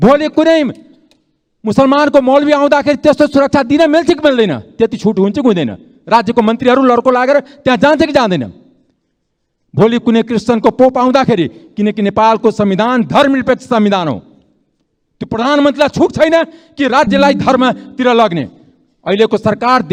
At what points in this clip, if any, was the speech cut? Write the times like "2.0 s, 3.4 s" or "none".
none